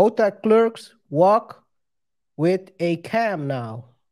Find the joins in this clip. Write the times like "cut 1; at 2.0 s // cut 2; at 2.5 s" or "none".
cut 1; at 0.9 s